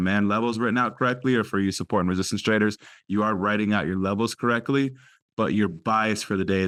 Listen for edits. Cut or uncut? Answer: uncut